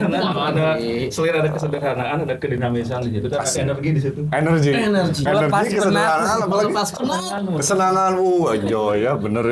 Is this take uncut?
yes; 0 cuts

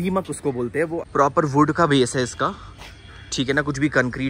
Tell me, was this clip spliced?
yes; 1 cut; at 1.0 s

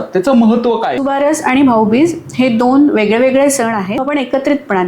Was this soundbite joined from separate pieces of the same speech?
yes; 2 cuts; at 0.9 s, 4.0 s

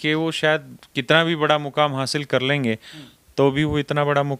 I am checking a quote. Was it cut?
no; 0 cuts

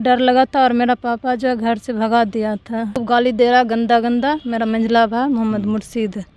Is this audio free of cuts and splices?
no; 1 cut; at 3.0 s

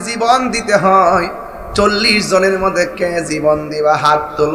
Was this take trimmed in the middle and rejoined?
no; 0 cuts

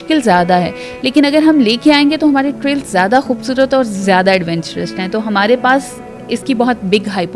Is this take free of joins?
yes; 0 cuts

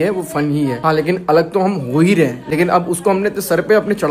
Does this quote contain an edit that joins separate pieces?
no; 0 cuts

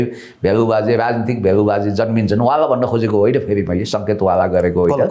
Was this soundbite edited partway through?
no; 0 cuts

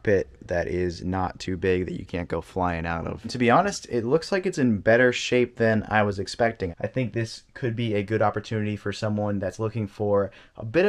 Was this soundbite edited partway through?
yes; 2 cuts; at 3.3 s, 6.7 s

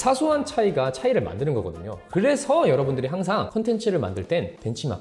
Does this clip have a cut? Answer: no; 0 cuts

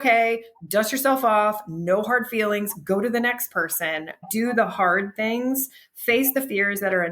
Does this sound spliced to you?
yes; 1 cut; at 4.2 s

